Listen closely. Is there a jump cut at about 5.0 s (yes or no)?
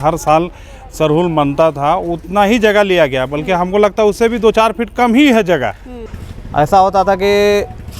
no